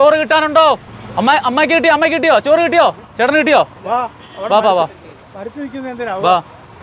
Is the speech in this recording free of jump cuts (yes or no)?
yes